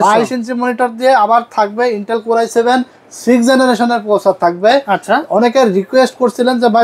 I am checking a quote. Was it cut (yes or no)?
no